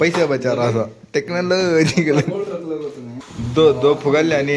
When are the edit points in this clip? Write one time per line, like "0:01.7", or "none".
0:03.0